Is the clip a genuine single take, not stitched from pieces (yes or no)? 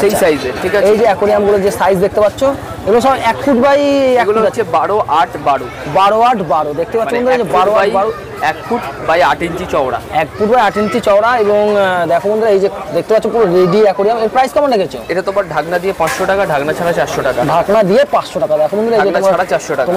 yes